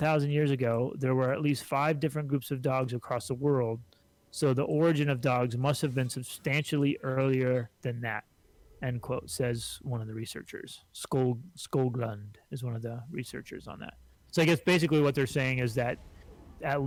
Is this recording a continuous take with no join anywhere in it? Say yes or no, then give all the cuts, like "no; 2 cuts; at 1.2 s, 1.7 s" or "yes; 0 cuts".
yes; 0 cuts